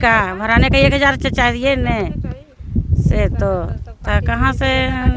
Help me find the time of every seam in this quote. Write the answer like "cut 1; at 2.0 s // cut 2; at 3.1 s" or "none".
none

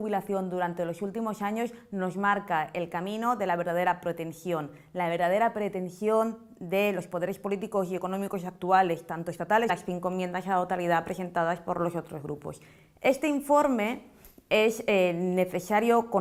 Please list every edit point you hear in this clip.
none

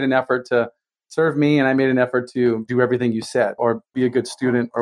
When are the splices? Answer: cut 1; at 2.7 s // cut 2; at 3.6 s

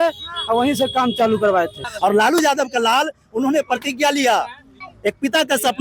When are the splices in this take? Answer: cut 1; at 1.8 s // cut 2; at 4.8 s

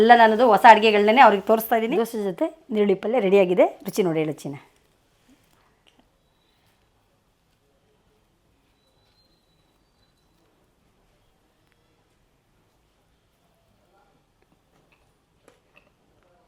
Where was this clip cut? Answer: cut 1; at 1.9 s

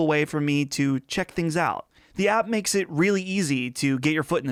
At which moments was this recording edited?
none

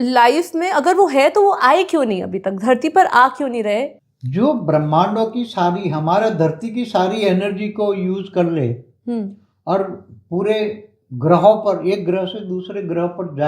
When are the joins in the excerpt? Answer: cut 1; at 3.9 s

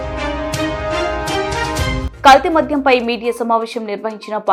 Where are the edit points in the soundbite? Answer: none

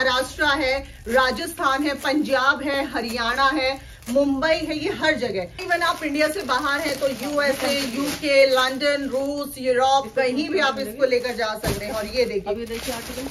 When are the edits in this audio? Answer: none

